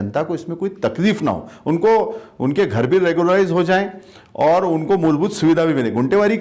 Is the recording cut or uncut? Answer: uncut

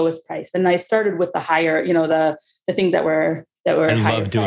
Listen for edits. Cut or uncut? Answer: cut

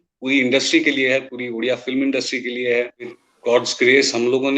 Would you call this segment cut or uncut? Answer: cut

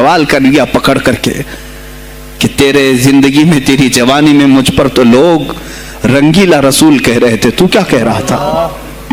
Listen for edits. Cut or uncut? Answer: uncut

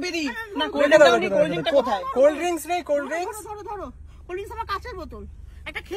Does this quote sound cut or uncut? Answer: uncut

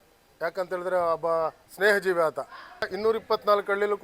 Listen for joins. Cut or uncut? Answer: cut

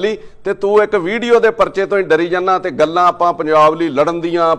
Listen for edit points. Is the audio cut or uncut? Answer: uncut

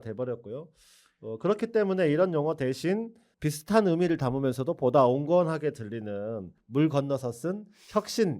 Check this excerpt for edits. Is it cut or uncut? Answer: cut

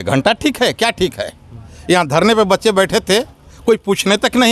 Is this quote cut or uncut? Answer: uncut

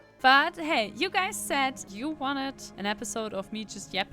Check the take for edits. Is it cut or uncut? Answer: cut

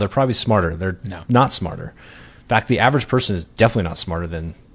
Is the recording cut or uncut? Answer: uncut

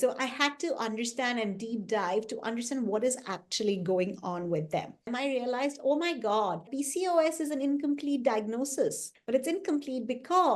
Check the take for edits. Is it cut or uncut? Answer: cut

